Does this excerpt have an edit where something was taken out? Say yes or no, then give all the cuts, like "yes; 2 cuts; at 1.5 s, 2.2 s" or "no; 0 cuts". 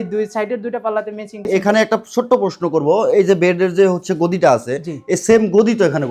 yes; 1 cut; at 1.4 s